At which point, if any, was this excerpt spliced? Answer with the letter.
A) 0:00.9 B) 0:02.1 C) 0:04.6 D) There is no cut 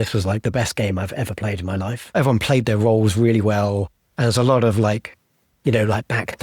B